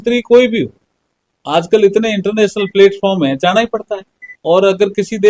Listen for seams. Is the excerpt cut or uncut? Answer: uncut